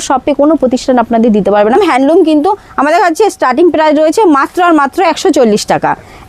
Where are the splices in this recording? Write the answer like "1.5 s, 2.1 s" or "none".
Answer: 1.8 s